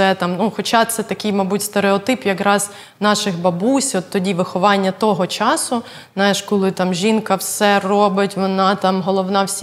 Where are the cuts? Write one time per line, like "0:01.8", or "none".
none